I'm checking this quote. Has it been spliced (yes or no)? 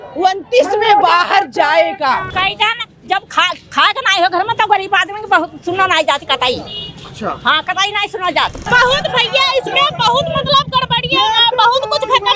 yes